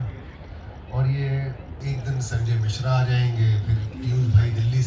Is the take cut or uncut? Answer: cut